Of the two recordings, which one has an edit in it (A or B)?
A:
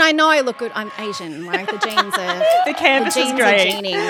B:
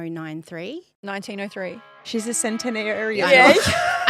B